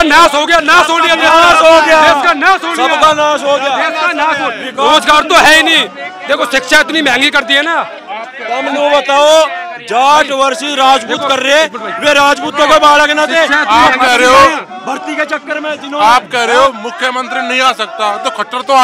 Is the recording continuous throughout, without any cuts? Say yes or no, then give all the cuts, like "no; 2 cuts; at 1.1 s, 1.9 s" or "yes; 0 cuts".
yes; 0 cuts